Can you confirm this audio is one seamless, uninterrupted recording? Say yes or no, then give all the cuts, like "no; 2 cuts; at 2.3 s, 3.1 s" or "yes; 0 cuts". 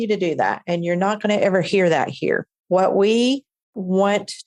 yes; 0 cuts